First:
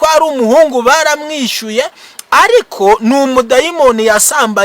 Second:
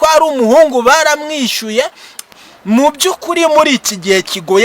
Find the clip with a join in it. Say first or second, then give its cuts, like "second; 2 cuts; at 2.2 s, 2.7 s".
second; 1 cut; at 2.2 s